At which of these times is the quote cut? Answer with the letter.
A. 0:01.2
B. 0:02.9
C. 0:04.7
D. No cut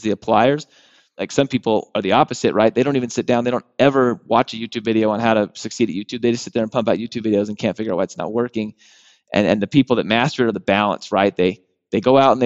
A